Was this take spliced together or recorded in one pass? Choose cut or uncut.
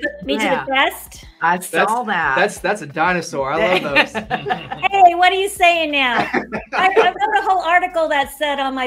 uncut